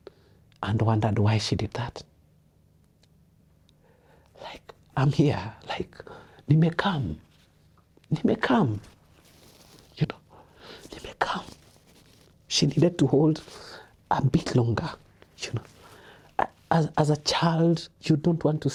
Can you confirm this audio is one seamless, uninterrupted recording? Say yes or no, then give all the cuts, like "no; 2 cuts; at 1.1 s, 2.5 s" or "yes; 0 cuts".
yes; 0 cuts